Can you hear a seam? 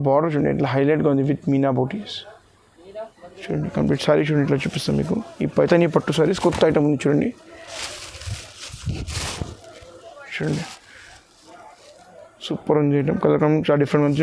no; 0 cuts

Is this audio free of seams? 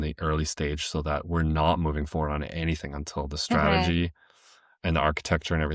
yes; 0 cuts

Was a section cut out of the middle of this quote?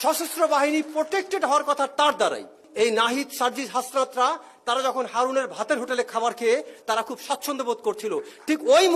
yes; 1 cut; at 2.6 s

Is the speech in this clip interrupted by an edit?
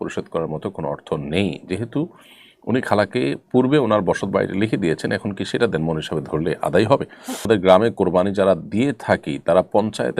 yes; 1 cut; at 7.4 s

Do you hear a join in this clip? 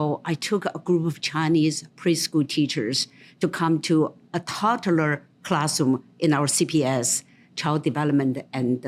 no; 0 cuts

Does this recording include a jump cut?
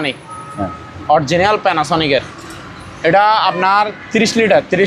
no; 0 cuts

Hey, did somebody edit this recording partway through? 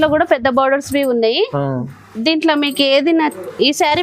no; 0 cuts

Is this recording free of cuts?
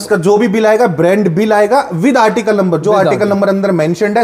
yes; 0 cuts

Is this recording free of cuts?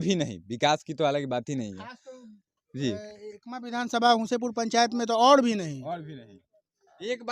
yes; 0 cuts

